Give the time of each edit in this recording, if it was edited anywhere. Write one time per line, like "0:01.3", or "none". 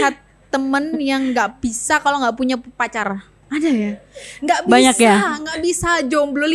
0:03.3